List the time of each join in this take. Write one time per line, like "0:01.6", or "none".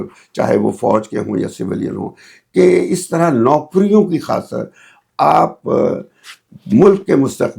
none